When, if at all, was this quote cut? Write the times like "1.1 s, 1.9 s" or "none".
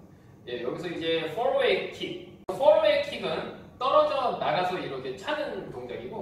3.2 s